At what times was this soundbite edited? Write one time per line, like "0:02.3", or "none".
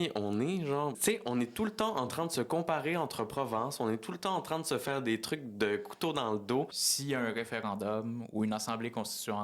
0:01.0
0:06.8